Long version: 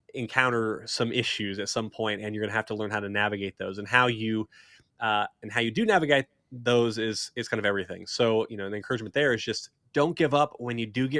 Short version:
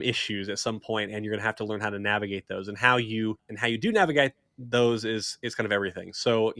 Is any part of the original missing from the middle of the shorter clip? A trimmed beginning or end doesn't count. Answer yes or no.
yes